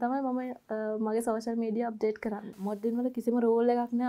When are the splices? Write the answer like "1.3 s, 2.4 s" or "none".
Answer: 2.6 s